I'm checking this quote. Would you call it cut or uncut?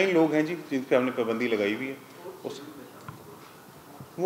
uncut